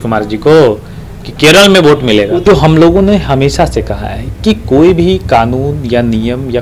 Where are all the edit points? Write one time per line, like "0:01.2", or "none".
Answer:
0:02.4